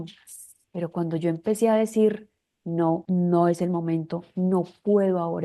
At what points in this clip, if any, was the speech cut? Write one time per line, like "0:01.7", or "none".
0:03.0